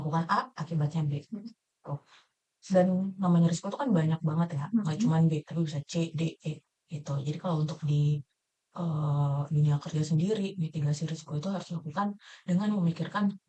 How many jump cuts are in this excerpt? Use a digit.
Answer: 0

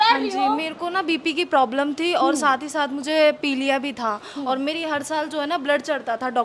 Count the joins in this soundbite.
0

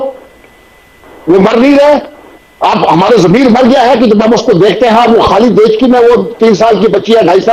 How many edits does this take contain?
0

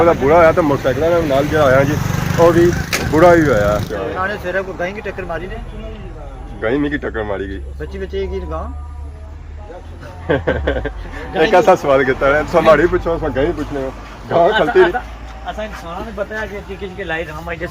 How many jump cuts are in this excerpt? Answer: 1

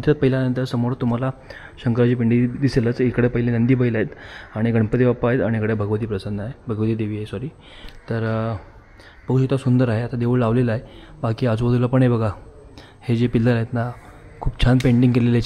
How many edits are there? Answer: 0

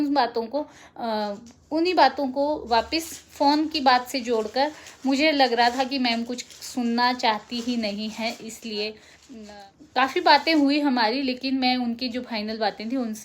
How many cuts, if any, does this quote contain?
0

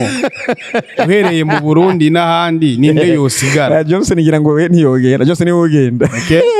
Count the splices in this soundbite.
0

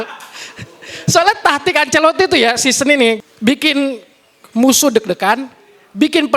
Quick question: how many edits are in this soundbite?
1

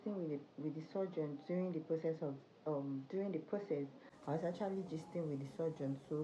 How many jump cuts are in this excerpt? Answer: 0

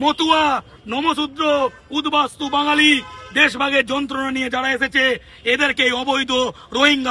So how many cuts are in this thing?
0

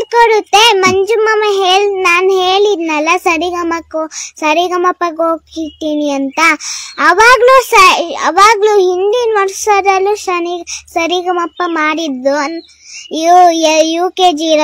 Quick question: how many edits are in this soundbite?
0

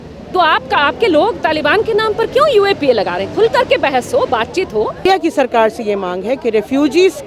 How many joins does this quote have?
1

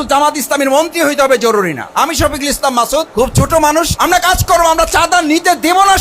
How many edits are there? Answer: 2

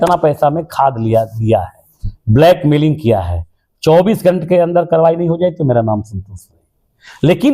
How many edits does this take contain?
0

